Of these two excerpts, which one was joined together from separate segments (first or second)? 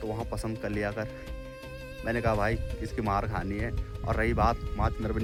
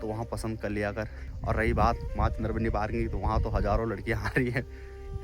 second